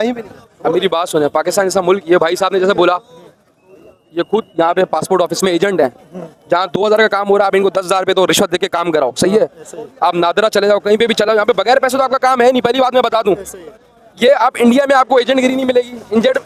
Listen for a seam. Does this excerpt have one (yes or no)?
no